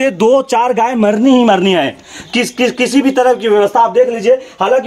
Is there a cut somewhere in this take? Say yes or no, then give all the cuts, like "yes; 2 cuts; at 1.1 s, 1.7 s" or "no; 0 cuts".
no; 0 cuts